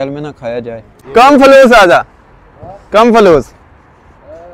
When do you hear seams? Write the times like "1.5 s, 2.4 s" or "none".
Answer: 0.9 s